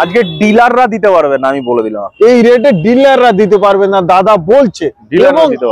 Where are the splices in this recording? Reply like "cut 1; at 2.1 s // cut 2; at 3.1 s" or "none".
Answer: none